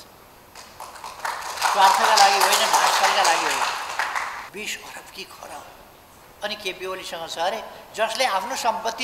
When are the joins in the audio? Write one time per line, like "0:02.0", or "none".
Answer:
0:04.5